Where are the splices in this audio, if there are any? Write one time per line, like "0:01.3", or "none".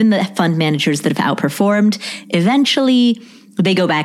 none